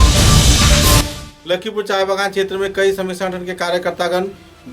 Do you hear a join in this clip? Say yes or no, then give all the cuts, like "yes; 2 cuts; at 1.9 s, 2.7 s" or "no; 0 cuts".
yes; 1 cut; at 1.1 s